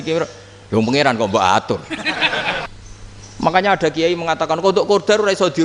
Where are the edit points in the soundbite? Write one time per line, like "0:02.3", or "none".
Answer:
0:02.7